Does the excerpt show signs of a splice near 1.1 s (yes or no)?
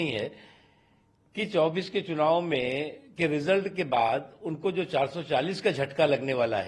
no